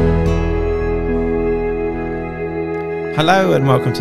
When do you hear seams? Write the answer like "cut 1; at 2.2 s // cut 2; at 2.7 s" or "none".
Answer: none